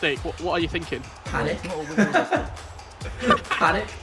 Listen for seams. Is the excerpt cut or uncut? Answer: cut